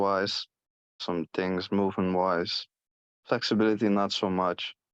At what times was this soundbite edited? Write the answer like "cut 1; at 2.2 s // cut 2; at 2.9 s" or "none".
cut 1; at 1.0 s